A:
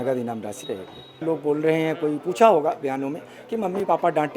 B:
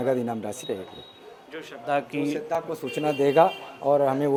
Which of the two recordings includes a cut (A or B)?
A